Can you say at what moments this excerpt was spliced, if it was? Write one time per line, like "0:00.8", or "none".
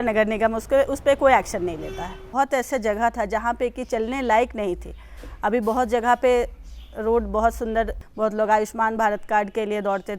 0:02.3
0:08.0